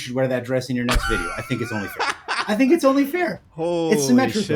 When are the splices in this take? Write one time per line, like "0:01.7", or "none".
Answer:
none